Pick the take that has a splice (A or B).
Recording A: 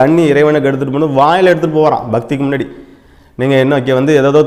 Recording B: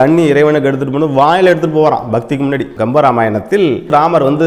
B